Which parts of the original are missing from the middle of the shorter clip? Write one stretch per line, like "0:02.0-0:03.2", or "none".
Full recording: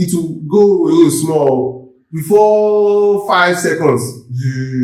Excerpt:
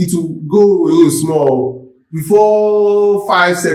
none